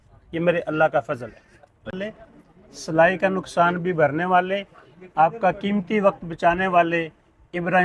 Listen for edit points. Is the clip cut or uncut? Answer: cut